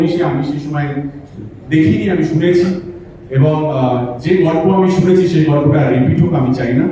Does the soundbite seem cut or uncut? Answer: uncut